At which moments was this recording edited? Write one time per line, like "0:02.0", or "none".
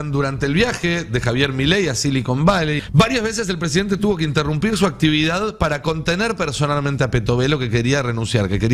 0:02.8